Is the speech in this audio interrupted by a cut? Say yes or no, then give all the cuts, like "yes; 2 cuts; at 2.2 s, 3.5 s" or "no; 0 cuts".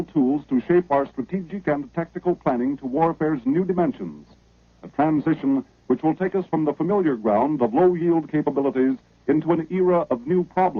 yes; 1 cut; at 1.7 s